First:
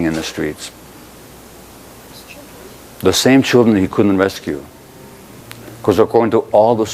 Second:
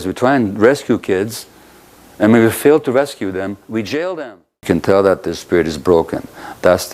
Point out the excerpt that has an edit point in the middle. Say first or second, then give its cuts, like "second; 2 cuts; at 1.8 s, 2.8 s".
second; 1 cut; at 4.5 s